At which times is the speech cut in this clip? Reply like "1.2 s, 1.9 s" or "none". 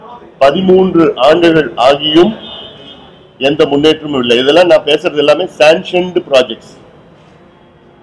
none